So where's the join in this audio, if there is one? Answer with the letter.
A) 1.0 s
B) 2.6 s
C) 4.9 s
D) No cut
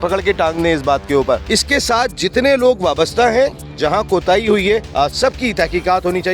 C